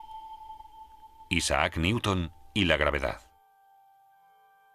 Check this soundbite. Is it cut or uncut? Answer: cut